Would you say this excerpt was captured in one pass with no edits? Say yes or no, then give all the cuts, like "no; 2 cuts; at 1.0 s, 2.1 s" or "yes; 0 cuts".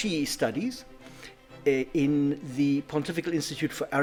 yes; 0 cuts